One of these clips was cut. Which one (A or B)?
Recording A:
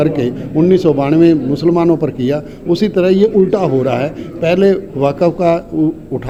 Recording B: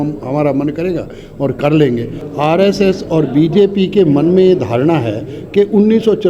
B